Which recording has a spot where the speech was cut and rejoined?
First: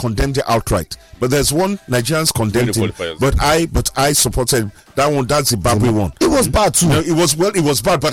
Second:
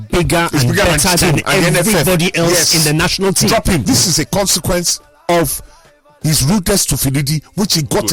second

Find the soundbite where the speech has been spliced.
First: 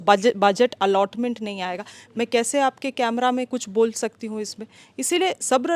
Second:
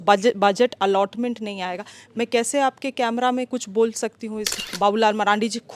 second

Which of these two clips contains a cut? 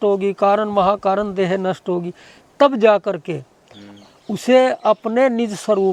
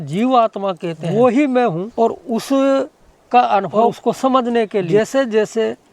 second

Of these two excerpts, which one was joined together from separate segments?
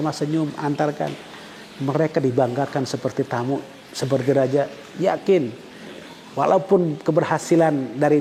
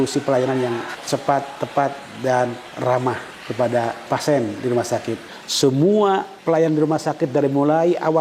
second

